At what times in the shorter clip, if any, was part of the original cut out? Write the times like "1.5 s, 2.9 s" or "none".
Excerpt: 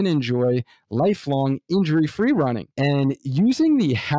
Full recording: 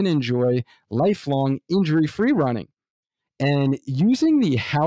2.7 s